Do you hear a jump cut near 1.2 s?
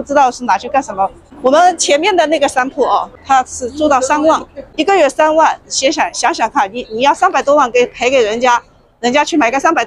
yes; 1 cut; at 1.2 s

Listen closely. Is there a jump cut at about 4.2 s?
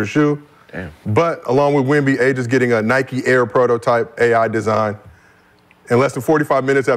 no; 0 cuts

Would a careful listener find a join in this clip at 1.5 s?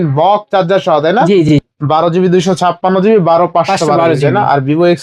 yes; 1 cut; at 1.5 s

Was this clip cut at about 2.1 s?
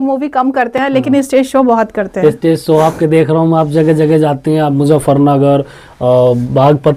no; 0 cuts

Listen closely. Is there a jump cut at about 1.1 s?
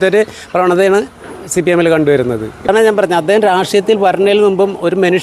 no; 1 cut; at 2.7 s

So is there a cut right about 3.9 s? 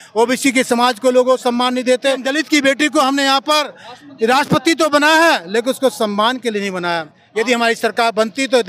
no; 2 cuts; at 2.3 s, 7.2 s

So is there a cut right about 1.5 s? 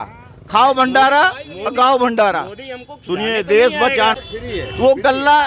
no; 1 cut; at 4.2 s

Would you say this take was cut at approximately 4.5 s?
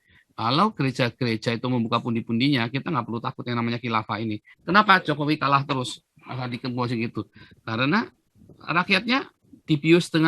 yes; 1 cut; at 4.5 s

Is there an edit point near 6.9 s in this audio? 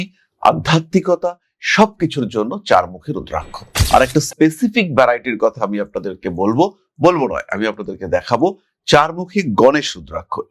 no; 1 cut; at 3.7 s

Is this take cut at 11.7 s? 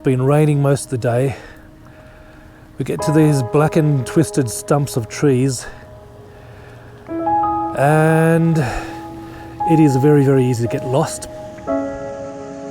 yes; 1 cut; at 11.7 s

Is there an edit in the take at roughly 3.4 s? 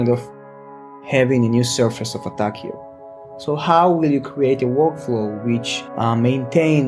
no; 2 cuts; at 1.0 s, 5.8 s

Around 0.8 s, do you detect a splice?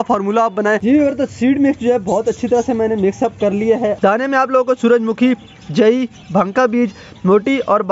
yes; 2 cuts; at 0.8 s, 4.0 s

